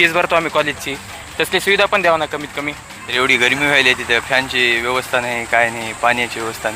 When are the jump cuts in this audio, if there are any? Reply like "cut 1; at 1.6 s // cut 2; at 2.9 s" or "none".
cut 1; at 2.9 s